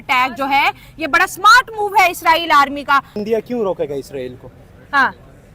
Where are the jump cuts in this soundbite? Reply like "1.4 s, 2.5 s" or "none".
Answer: 3.2 s